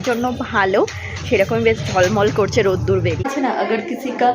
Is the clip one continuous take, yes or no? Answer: no